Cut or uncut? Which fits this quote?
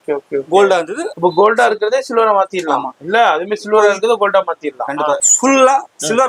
cut